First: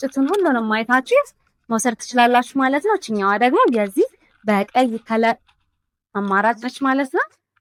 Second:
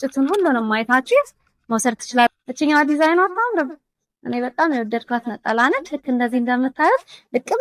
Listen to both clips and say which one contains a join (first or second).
second